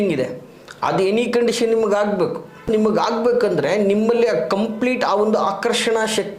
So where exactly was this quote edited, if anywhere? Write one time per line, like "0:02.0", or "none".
0:02.7